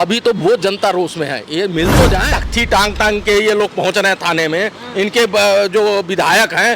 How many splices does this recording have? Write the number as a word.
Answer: one